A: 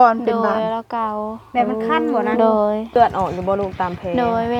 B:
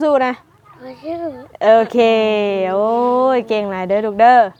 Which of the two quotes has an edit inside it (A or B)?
A